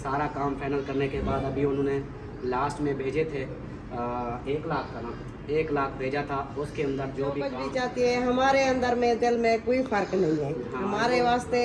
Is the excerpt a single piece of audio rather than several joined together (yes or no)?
no